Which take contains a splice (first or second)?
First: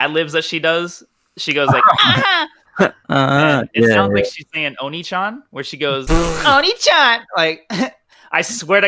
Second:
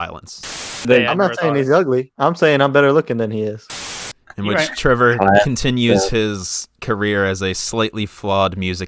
second